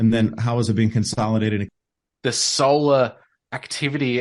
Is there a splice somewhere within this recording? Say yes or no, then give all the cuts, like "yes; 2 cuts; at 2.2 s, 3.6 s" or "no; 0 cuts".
yes; 1 cut; at 1.7 s